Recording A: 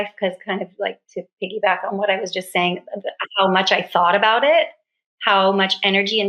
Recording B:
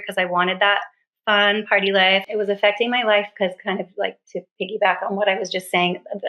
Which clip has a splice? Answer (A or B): B